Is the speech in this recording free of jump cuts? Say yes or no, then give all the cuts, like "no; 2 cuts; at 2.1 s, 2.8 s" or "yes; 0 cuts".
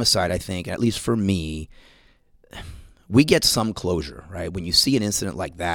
yes; 0 cuts